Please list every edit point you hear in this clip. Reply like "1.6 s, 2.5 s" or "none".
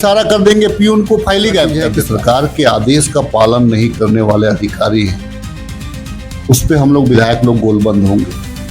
1.9 s

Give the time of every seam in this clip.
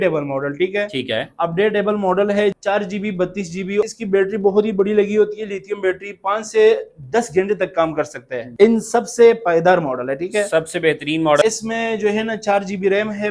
2.6 s, 3.8 s, 8.4 s, 11.4 s

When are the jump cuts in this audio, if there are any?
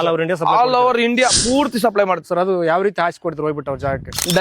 2.2 s

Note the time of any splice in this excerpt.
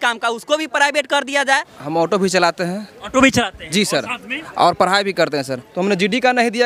1.8 s, 5.6 s

